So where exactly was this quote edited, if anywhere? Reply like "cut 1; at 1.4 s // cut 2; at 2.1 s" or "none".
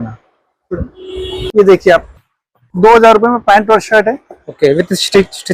cut 1; at 1.4 s